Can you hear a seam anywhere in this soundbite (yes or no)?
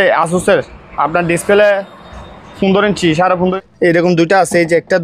yes